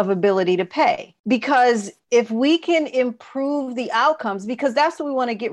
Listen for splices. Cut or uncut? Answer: cut